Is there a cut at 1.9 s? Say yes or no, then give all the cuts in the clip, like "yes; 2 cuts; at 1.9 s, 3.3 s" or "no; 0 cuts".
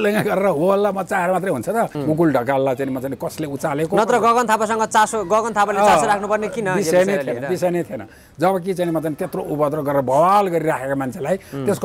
yes; 1 cut; at 1.9 s